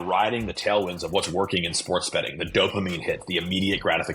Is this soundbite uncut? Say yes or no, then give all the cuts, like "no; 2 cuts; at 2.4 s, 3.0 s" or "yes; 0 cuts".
yes; 0 cuts